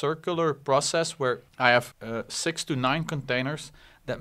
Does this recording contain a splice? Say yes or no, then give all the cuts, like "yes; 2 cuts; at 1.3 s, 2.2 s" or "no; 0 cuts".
yes; 2 cuts; at 1.5 s, 2.0 s